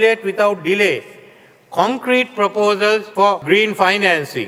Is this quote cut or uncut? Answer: uncut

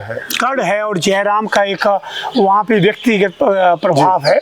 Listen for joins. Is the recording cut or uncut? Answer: uncut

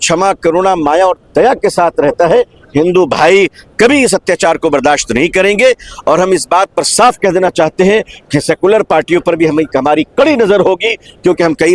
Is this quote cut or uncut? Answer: uncut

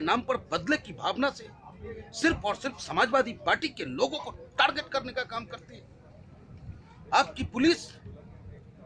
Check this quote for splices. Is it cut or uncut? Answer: uncut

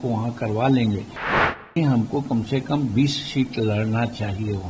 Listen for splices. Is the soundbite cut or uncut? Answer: cut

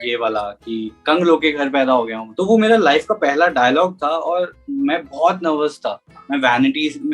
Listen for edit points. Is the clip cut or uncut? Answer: cut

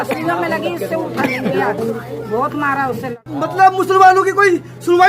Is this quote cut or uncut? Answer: cut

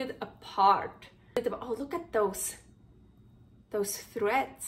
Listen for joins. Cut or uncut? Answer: cut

